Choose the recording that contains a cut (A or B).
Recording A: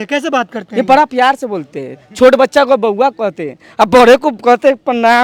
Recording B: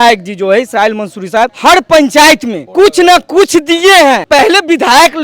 B